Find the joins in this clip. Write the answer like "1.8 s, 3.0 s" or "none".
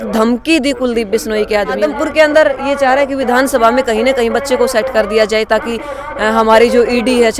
1.8 s